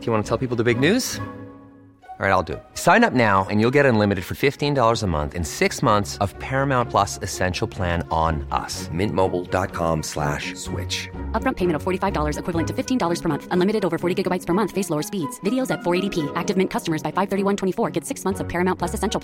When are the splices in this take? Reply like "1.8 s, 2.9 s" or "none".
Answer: none